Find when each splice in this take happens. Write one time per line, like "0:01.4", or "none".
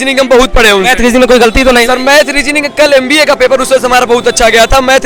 none